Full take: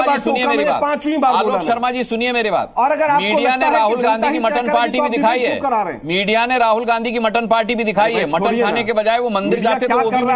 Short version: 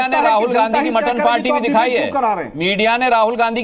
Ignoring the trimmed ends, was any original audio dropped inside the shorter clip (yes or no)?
no